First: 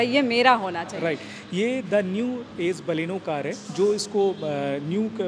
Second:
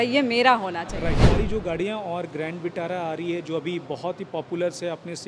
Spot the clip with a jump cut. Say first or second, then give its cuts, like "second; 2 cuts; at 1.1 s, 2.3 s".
second; 1 cut; at 1.2 s